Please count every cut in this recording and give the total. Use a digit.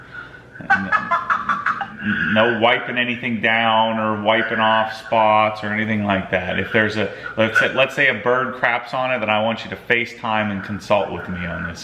1